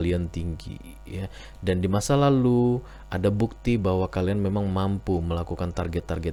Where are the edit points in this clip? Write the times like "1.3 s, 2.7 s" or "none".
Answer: none